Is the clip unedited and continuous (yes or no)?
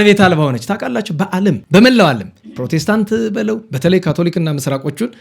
no